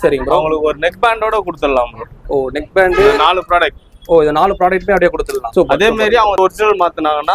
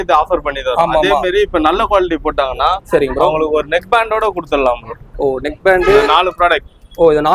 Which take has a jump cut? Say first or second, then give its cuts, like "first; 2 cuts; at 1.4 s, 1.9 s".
first; 2 cuts; at 5.4 s, 6.4 s